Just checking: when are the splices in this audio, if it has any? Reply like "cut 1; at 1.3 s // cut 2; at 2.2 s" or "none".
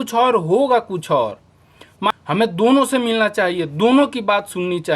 cut 1; at 2.1 s